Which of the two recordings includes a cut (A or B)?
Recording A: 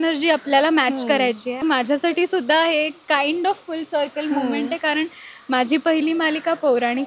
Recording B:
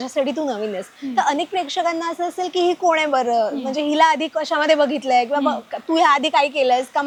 A